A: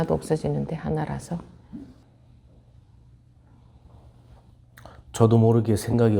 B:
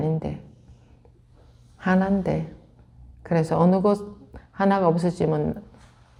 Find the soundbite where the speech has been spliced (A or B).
A